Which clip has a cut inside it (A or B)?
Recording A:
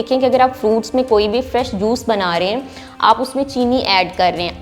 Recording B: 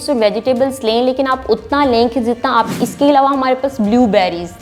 B